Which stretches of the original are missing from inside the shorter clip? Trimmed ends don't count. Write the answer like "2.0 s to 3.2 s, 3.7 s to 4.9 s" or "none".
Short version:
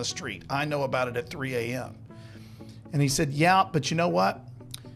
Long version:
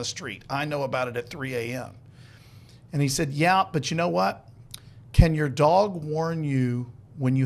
none